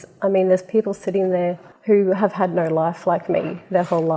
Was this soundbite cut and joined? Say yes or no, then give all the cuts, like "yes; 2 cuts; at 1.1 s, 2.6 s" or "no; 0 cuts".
yes; 1 cut; at 1.7 s